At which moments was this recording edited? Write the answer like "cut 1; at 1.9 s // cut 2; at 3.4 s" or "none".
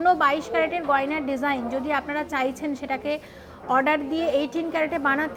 none